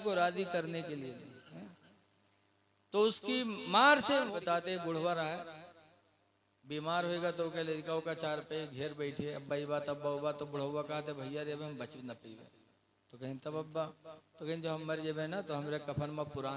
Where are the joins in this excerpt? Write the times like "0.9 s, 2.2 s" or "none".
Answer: 4.3 s